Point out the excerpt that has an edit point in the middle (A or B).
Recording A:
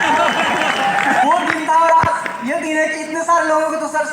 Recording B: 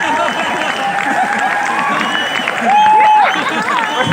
A